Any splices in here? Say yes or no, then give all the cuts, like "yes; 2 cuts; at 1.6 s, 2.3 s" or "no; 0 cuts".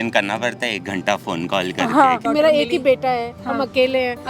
yes; 1 cut; at 2.4 s